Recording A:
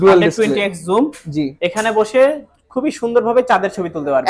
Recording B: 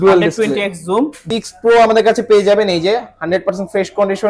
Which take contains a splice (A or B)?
B